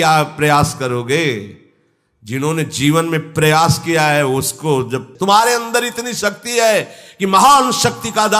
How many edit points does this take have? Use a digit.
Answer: 1